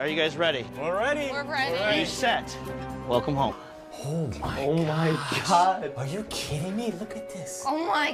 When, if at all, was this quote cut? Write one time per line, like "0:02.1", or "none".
none